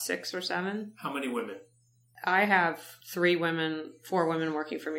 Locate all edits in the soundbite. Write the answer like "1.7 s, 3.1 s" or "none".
2.1 s, 2.9 s

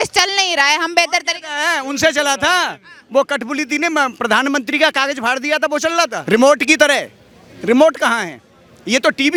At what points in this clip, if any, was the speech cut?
none

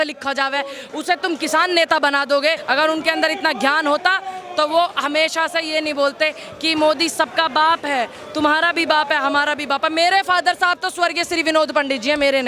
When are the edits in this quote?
2.6 s

